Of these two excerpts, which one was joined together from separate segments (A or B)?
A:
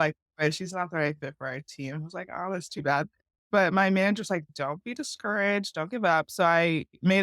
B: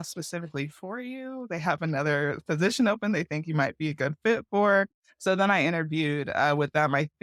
A